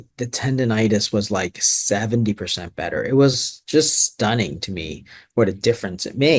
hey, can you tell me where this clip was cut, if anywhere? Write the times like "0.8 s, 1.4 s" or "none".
none